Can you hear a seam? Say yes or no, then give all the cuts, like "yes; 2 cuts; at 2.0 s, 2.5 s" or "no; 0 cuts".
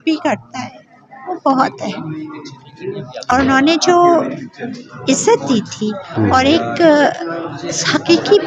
yes; 1 cut; at 3.3 s